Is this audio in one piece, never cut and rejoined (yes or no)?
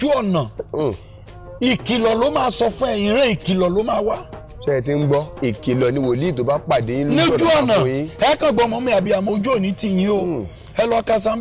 yes